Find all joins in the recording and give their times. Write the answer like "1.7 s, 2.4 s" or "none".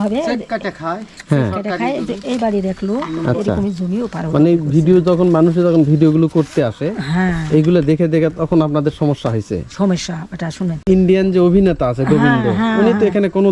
10.8 s